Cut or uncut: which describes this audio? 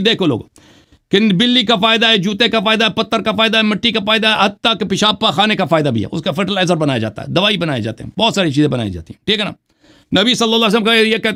uncut